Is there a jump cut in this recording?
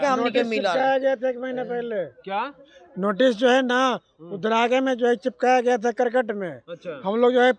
no; 0 cuts

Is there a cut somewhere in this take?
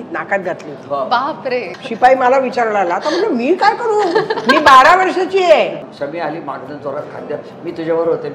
yes; 2 cuts; at 1.7 s, 5.9 s

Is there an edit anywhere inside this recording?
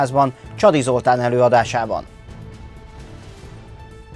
no; 0 cuts

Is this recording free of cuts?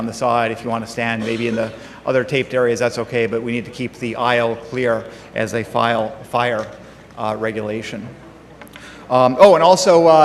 yes; 0 cuts

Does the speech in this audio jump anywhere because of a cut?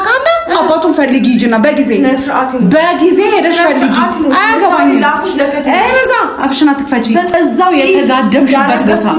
yes; 1 cut; at 7.4 s

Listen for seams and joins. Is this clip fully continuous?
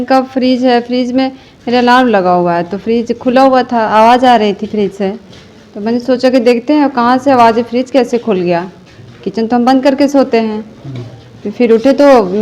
yes; 0 cuts

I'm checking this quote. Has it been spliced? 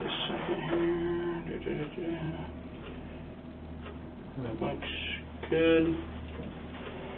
no; 0 cuts

